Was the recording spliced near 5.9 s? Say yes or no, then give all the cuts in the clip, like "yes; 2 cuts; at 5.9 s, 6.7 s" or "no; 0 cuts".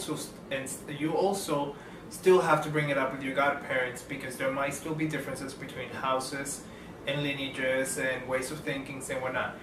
yes; 1 cut; at 5.9 s